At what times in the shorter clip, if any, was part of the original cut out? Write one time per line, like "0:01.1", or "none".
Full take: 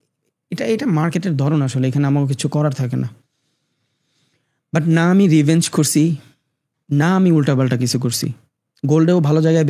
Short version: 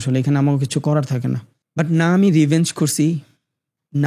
0:01.6